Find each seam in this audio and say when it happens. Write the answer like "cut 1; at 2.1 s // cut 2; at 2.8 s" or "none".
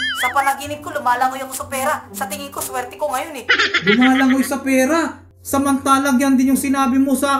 none